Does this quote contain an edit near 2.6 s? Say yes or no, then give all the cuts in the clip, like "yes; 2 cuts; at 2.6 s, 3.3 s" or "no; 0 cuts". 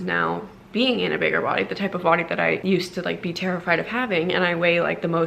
yes; 1 cut; at 2.6 s